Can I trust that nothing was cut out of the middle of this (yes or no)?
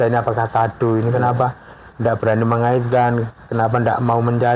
yes